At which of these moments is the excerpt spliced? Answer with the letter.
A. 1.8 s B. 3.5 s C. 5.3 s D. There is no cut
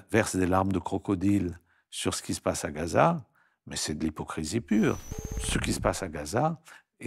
C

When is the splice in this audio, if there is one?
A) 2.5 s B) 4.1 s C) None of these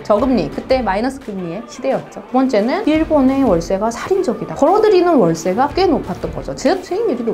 A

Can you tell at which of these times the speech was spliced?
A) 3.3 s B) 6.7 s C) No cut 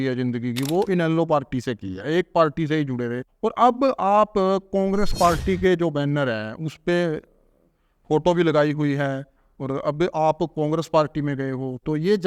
A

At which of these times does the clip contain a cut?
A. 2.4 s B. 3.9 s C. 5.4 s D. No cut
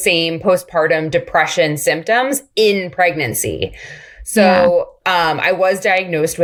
D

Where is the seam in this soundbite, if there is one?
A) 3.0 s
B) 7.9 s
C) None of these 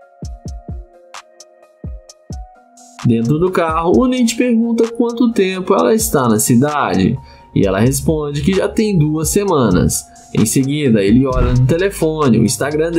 A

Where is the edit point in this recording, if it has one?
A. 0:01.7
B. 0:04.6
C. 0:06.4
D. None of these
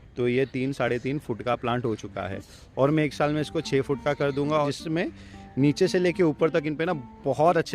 B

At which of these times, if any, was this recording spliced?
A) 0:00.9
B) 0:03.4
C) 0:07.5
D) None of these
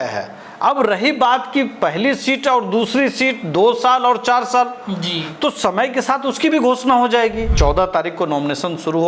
C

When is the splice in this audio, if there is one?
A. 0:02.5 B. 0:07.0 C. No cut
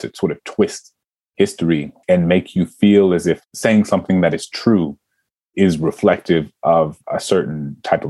B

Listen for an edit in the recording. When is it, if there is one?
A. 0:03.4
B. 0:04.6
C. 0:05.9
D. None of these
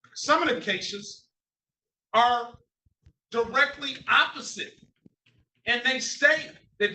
B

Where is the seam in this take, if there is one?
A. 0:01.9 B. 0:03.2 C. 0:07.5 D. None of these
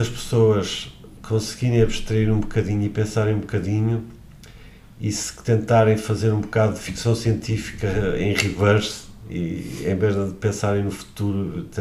D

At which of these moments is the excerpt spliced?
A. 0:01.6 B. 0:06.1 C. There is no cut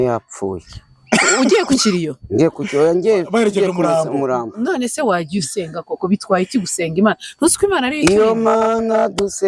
C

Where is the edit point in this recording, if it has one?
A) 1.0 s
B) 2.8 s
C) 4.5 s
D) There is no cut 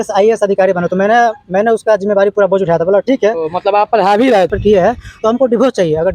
C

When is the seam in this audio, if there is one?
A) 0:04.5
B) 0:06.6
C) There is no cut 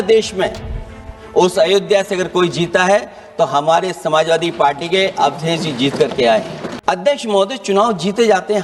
B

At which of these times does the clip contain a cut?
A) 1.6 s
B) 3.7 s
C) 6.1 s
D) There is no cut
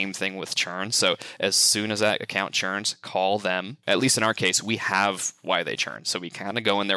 B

